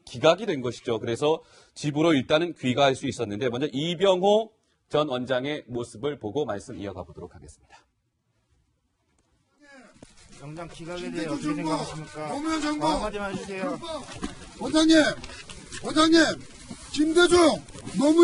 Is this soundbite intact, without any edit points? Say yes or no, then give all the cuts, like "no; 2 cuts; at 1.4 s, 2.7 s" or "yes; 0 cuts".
yes; 0 cuts